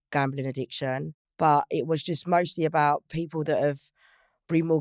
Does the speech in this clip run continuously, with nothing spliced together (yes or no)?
no